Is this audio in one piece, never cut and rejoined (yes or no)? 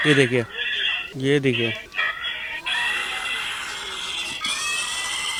yes